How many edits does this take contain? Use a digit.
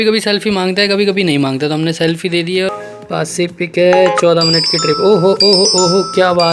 1